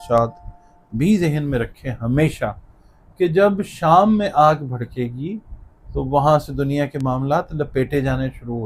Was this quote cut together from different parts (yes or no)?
no